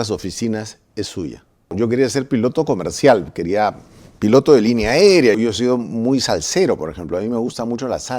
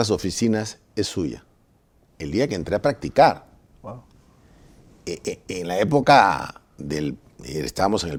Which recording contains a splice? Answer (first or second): first